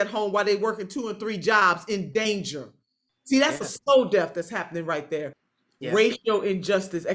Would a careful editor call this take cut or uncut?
cut